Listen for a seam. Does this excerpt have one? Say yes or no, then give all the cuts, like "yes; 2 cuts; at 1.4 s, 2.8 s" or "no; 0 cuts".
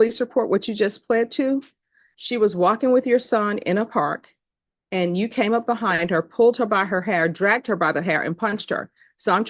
no; 0 cuts